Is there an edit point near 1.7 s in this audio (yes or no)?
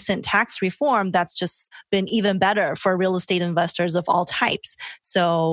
yes